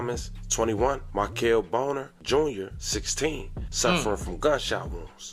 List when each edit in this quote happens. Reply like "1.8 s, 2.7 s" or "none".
none